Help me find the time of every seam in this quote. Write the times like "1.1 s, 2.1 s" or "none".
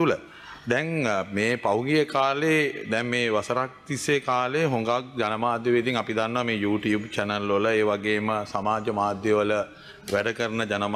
none